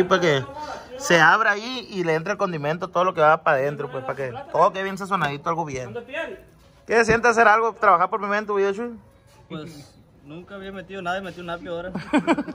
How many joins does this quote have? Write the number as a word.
zero